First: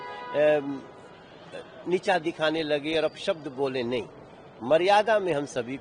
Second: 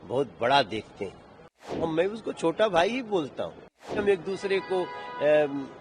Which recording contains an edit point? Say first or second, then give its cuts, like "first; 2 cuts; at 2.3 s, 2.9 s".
second; 2 cuts; at 1.9 s, 3.9 s